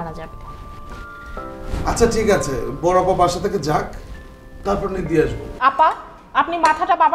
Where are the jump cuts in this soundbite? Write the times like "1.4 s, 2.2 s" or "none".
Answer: 5.4 s